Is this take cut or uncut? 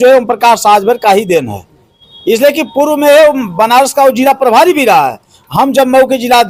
uncut